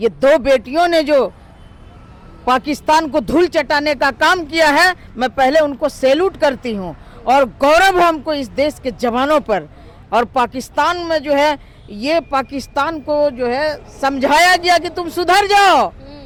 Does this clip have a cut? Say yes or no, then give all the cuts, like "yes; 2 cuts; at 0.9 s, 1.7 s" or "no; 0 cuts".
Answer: no; 0 cuts